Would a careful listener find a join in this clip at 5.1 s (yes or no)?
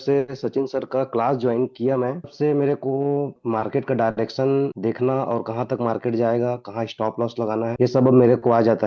no